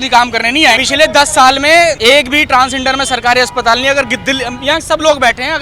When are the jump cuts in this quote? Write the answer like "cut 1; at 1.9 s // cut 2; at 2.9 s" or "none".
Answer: cut 1; at 0.8 s // cut 2; at 2.0 s